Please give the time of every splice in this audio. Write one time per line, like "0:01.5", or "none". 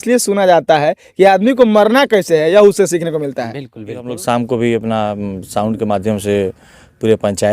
0:04.1